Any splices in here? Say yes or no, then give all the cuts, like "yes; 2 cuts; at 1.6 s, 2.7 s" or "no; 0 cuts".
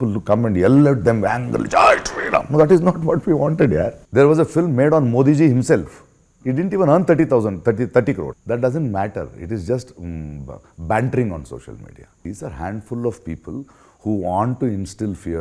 yes; 3 cuts; at 4.0 s, 8.4 s, 12.2 s